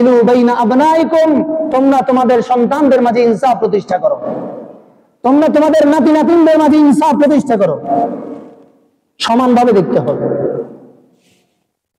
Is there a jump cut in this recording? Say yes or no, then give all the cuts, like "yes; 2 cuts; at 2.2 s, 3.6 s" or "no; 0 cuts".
no; 0 cuts